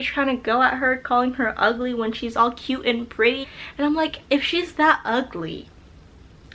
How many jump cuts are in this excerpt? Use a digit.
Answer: 1